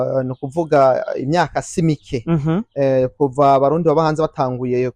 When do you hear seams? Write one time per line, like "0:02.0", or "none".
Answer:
none